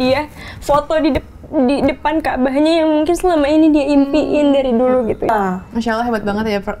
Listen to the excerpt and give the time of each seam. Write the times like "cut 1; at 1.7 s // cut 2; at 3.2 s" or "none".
cut 1; at 5.3 s